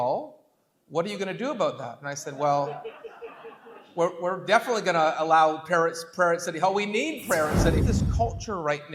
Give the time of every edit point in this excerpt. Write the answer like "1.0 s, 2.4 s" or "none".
7.8 s